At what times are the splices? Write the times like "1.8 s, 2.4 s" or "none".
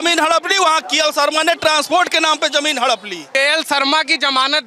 3.2 s